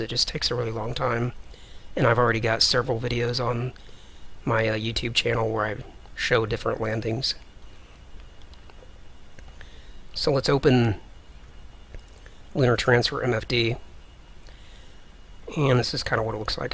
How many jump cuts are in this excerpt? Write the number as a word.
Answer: one